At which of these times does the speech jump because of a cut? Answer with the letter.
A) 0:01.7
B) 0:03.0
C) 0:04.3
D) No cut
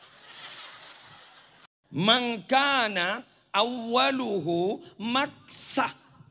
A